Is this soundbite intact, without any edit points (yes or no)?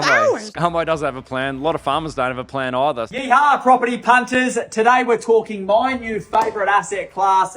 no